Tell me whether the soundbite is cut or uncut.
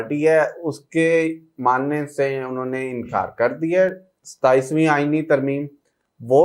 uncut